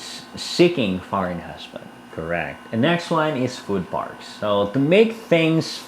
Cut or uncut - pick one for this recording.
cut